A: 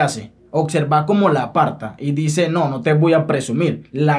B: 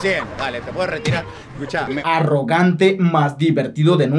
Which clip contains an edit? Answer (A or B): B